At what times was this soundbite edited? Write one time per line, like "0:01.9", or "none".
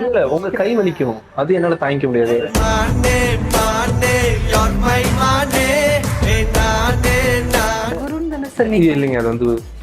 0:07.9